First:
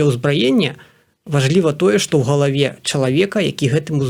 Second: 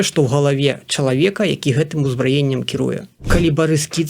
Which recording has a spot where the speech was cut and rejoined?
second; 1 cut; at 3.2 s

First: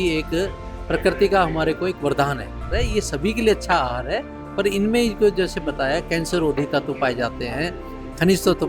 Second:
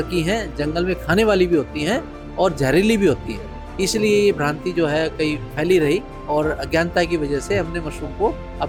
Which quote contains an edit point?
first; 1 cut; at 2.7 s

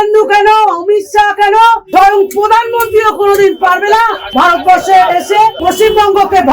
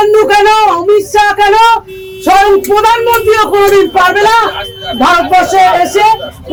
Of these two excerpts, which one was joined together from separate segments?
first; 3 cuts; at 1.8 s, 4.2 s, 5.6 s

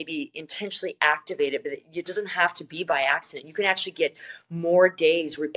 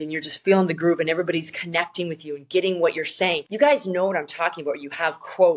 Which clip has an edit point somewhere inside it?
second; 1 cut; at 3.5 s

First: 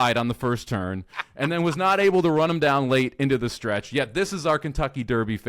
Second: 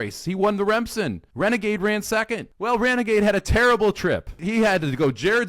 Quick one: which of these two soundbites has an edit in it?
second; 3 cuts; at 1.2 s, 2.5 s, 4.4 s

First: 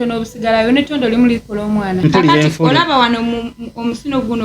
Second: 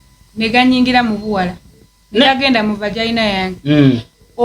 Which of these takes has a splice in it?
first; 1 cut; at 2.0 s

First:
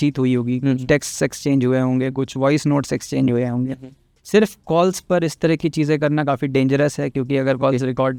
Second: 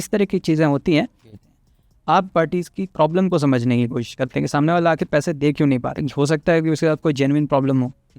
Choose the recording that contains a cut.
second; 2 cuts; at 1.4 s, 6.0 s

